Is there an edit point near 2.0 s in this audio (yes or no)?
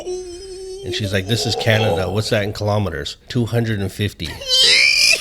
no